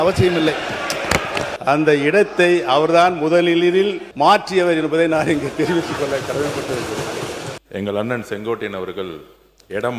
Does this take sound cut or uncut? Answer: cut